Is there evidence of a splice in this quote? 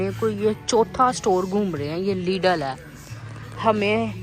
no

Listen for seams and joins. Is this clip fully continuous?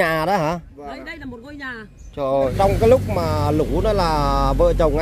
no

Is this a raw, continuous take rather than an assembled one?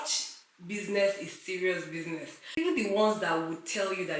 no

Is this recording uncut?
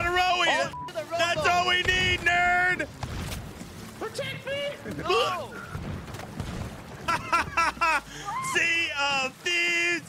yes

